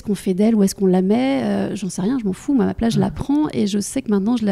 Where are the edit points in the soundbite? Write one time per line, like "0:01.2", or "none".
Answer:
none